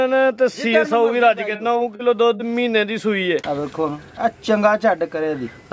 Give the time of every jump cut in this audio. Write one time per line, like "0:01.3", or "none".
0:03.4